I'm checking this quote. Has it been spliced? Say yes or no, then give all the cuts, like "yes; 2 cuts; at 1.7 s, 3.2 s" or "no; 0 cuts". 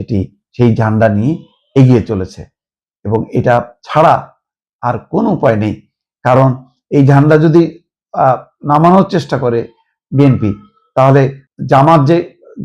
yes; 1 cut; at 11.5 s